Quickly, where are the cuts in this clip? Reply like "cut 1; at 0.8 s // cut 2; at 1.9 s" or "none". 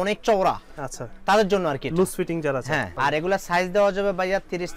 cut 1; at 2.9 s